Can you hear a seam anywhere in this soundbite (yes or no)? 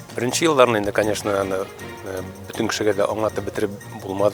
no